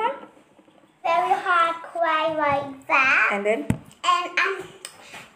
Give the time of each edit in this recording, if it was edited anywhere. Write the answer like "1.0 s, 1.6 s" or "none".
0.9 s